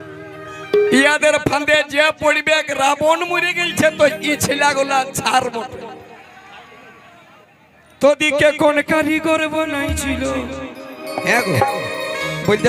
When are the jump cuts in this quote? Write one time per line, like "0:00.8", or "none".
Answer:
0:00.9